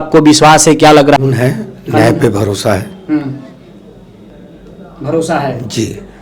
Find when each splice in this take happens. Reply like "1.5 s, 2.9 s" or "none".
1.2 s